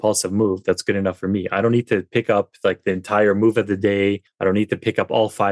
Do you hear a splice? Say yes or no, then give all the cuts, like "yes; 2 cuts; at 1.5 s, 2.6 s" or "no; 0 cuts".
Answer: yes; 1 cut; at 4.3 s